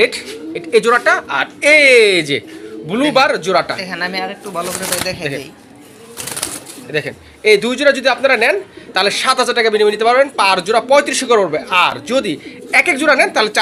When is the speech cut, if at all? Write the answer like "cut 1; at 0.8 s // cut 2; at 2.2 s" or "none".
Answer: none